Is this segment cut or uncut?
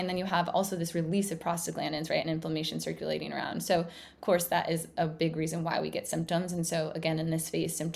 uncut